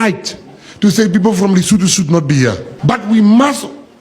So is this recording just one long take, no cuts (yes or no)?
no